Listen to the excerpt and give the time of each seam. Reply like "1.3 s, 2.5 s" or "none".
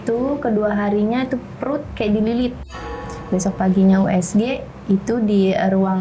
2.7 s